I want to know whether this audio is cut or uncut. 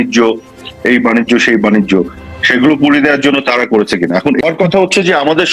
cut